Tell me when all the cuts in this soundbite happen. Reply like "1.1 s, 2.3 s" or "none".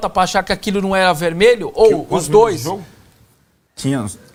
none